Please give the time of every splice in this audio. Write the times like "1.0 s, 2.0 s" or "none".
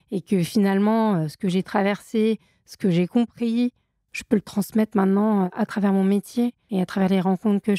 6.7 s